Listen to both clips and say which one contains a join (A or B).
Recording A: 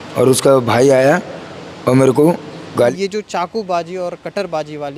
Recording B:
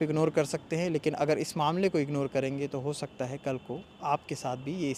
A